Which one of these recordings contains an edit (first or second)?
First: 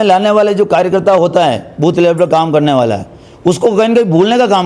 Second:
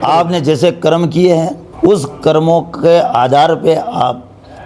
second